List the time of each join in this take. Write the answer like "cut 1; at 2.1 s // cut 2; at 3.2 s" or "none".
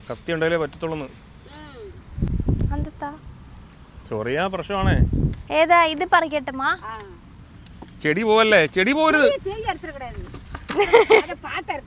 cut 1; at 2.3 s

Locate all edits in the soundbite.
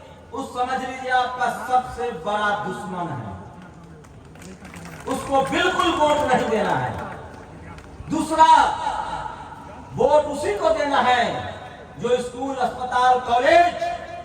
none

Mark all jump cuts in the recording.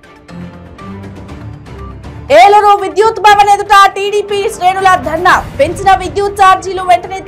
cut 1; at 2.2 s

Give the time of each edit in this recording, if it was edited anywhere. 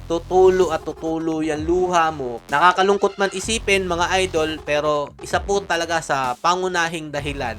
cut 1; at 2.4 s

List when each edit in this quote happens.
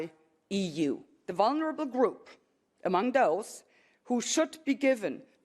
cut 1; at 1.2 s

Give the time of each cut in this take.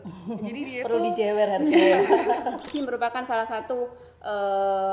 cut 1; at 2.7 s

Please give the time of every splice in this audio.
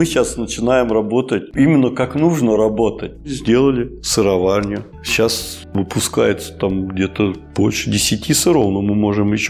cut 1; at 3.1 s // cut 2; at 4.8 s

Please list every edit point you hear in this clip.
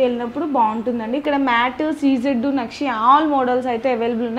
cut 1; at 1.2 s

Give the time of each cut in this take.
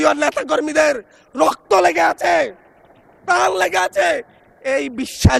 none

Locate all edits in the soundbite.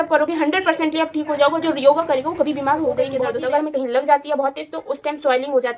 cut 1; at 3.2 s

